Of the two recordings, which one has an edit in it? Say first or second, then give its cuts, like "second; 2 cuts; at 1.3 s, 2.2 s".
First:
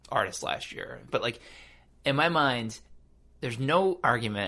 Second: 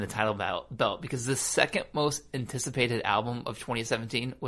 first; 1 cut; at 1.0 s